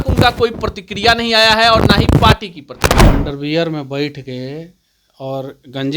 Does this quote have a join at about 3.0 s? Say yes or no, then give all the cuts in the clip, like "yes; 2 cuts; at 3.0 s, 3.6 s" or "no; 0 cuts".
yes; 1 cut; at 3.0 s